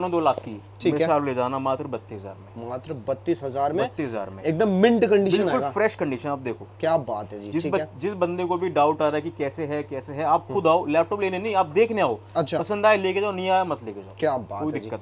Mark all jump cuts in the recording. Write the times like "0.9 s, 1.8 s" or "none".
none